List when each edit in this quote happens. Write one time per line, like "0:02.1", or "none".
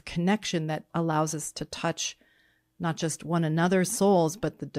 none